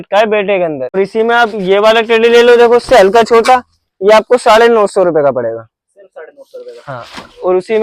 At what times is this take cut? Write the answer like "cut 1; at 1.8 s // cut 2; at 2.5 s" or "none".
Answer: cut 1; at 1.0 s